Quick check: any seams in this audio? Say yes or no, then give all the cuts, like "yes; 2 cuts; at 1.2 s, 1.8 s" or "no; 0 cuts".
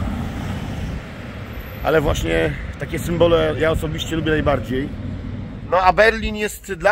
yes; 1 cut; at 5.5 s